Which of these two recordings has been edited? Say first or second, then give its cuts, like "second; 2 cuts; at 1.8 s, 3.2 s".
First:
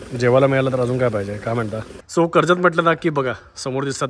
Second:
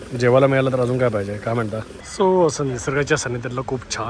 first; 1 cut; at 1.9 s